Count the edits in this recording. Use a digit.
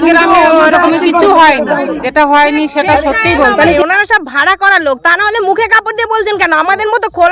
2